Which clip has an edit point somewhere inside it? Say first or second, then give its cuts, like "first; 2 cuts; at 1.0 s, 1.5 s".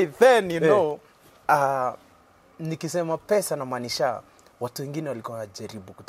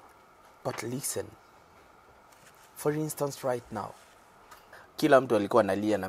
second; 1 cut; at 4.8 s